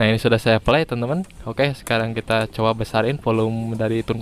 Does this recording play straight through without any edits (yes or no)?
yes